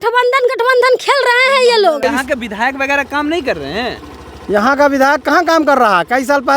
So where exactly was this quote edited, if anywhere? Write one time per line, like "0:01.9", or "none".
0:02.0